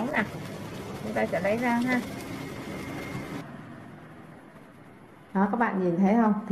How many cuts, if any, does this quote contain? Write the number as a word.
one